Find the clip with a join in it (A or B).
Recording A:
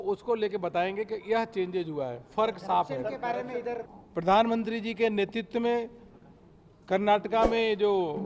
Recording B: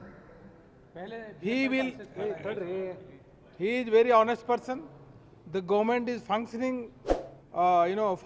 A